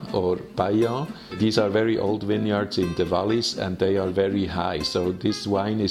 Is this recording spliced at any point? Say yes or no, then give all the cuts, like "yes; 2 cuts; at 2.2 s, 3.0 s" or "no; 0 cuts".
yes; 1 cut; at 1.4 s